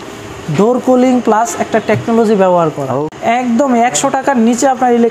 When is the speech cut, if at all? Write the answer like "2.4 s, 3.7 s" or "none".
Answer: 3.0 s